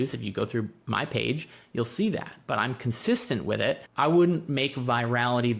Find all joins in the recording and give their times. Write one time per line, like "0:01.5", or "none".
0:03.9